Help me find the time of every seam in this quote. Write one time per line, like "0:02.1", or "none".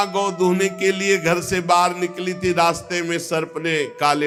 none